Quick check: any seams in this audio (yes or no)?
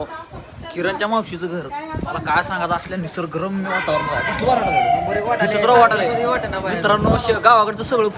no